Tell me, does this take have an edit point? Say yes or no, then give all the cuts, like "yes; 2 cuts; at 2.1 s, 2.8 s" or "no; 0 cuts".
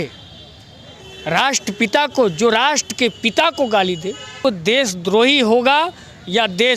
yes; 1 cut; at 4.3 s